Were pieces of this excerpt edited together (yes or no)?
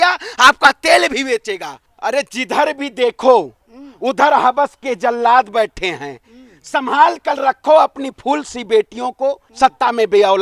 yes